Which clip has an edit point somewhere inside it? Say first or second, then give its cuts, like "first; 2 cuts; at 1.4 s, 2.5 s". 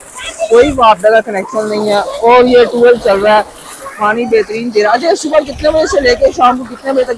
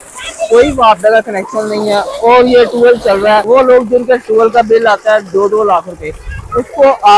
second; 1 cut; at 3.4 s